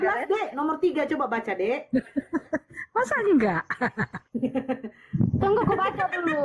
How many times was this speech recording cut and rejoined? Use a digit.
0